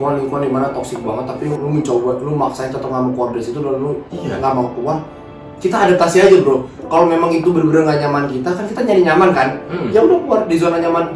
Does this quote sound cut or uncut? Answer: uncut